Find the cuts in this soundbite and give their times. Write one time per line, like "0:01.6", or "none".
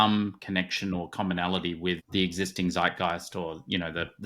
0:02.0

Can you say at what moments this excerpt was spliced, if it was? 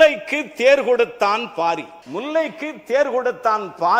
0:02.0

